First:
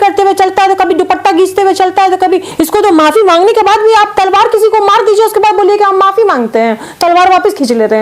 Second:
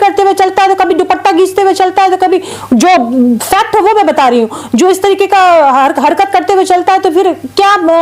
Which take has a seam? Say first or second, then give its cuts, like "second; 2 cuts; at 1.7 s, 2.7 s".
first; 1 cut; at 2.5 s